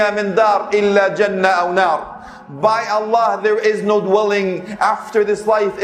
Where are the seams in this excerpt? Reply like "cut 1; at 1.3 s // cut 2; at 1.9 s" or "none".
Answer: none